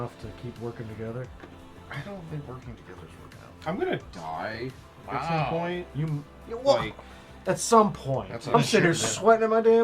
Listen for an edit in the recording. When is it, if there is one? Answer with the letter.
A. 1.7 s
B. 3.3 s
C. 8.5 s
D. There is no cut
C